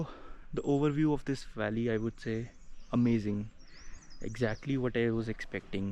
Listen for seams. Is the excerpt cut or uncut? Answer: uncut